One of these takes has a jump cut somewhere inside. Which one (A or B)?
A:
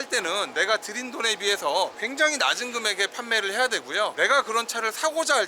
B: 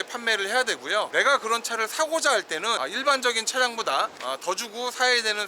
B